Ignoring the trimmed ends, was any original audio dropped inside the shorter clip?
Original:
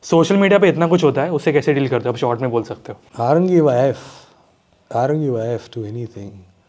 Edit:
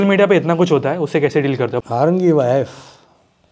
yes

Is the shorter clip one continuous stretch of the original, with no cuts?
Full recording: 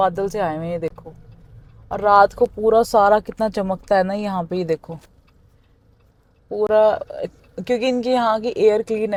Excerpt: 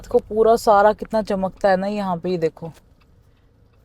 yes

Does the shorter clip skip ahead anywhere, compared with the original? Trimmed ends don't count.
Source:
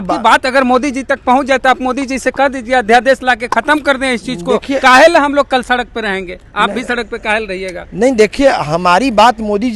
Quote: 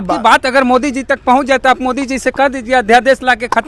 no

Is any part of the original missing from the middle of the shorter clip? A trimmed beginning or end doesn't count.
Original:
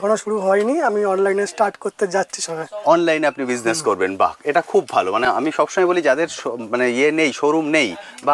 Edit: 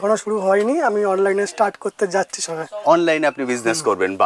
no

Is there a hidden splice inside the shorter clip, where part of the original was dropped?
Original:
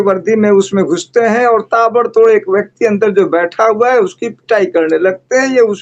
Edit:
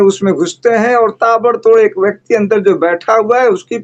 no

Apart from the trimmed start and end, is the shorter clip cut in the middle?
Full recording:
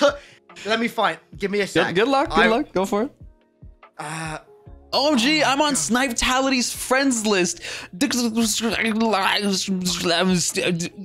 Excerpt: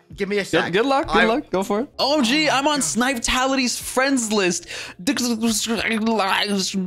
yes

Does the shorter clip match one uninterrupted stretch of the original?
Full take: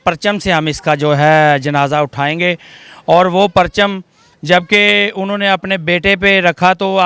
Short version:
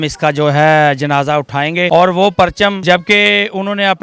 no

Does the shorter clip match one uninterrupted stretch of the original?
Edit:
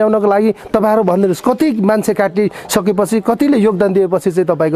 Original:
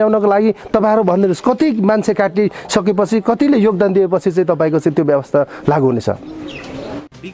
yes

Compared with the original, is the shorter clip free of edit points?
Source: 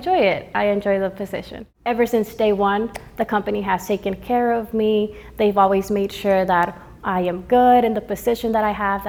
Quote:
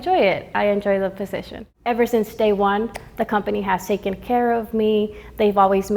yes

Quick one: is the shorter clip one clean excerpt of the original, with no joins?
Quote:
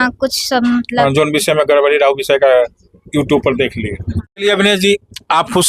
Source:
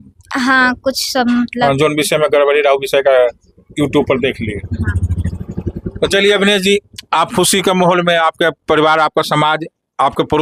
no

